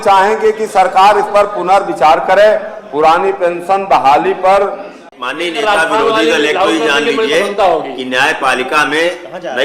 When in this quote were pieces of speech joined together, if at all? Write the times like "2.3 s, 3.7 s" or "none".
5.1 s

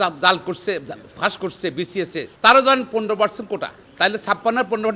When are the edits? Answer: 2.3 s, 3.8 s

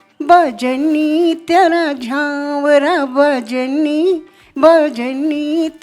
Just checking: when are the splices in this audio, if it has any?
none

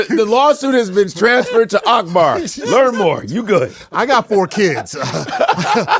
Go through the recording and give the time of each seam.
none

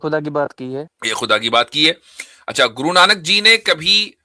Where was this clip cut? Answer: 1.0 s

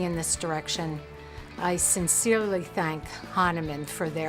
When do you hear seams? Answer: none

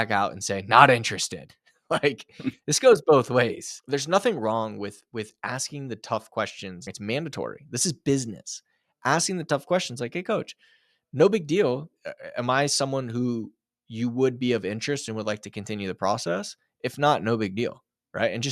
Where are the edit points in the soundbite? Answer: 3.7 s, 6.9 s, 11.9 s

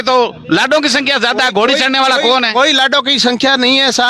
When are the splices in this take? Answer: none

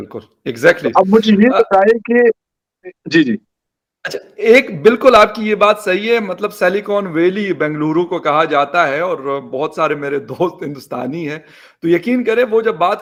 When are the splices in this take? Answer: none

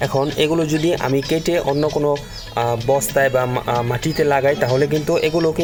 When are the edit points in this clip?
none

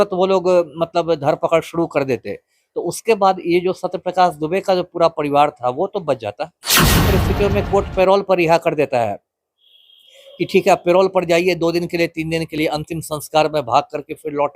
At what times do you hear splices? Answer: 7.0 s

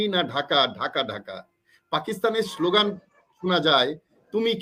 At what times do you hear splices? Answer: none

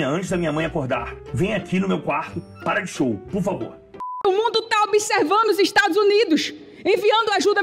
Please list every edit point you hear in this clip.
1.2 s, 4.1 s

